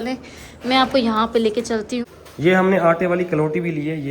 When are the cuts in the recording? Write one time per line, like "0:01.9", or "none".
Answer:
0:02.0